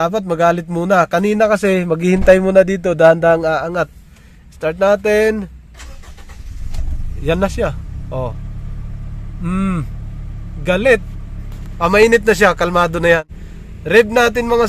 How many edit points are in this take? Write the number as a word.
one